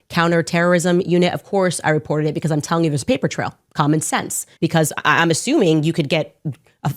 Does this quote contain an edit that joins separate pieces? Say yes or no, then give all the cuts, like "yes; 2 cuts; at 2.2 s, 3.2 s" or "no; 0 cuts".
yes; 1 cut; at 4.4 s